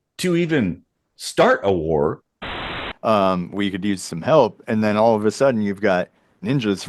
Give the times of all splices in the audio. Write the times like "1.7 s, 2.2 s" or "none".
2.7 s